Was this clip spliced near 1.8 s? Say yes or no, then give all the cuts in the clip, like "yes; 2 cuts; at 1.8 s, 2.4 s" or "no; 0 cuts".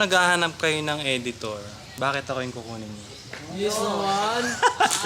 yes; 1 cut; at 1.8 s